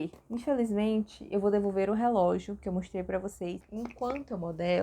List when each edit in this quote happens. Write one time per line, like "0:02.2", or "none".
0:03.6